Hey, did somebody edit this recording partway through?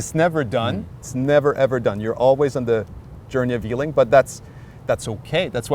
yes; 1 cut; at 1.0 s

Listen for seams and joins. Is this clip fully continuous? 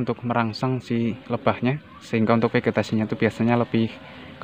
yes; 0 cuts

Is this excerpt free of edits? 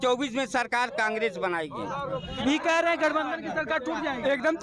yes; 0 cuts

